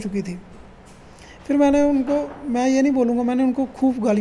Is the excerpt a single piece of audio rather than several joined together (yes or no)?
yes